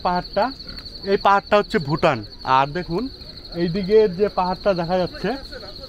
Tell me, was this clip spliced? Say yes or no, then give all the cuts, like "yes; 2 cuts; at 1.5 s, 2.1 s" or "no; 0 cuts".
yes; 1 cut; at 2.3 s